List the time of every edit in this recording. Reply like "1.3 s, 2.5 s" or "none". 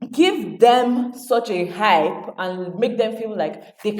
none